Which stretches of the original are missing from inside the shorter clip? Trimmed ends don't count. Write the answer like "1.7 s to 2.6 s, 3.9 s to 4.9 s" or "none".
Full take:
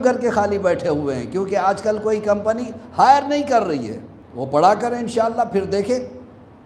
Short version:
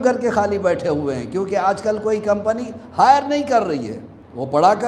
none